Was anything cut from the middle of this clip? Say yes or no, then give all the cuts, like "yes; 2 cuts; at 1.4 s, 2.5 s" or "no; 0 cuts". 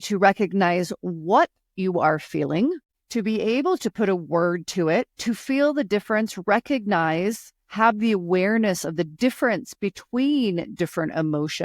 yes; 1 cut; at 3.0 s